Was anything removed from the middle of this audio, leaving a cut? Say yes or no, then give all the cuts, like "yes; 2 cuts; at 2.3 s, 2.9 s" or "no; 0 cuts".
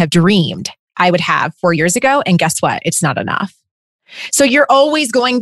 no; 0 cuts